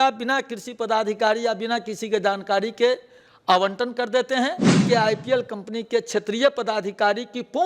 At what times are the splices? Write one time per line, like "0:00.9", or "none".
0:04.8